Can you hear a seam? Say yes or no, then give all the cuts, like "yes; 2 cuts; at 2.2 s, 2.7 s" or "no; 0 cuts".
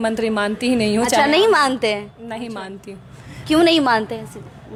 no; 0 cuts